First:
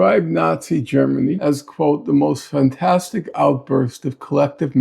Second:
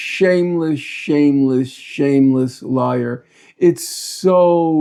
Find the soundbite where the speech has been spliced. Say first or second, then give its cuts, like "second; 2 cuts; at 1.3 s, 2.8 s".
first; 1 cut; at 1.4 s